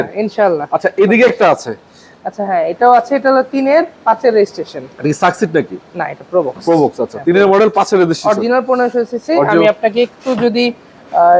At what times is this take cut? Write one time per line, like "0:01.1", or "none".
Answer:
none